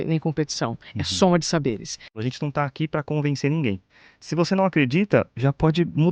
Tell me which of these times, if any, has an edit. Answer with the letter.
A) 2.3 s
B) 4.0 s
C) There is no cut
A